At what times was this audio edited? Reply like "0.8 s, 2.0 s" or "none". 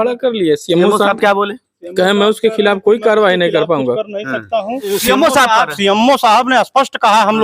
5.0 s